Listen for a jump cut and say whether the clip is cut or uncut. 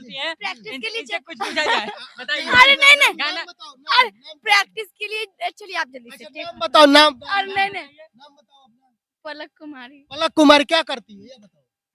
uncut